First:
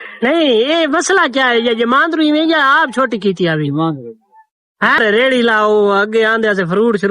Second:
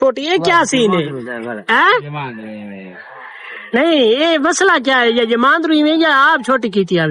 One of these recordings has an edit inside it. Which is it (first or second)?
first